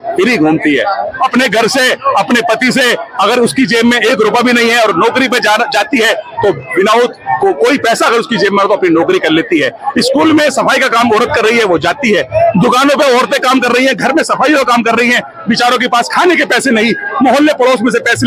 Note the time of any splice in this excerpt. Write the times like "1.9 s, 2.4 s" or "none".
none